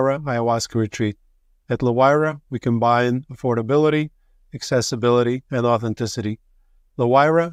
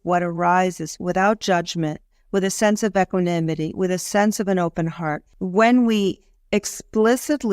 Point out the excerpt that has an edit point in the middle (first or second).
second